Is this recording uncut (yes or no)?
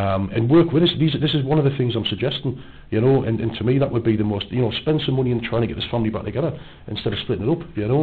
yes